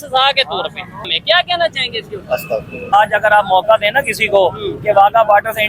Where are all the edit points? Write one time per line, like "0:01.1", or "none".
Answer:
0:01.1
0:02.9